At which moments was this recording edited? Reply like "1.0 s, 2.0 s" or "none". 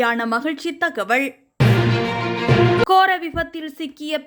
none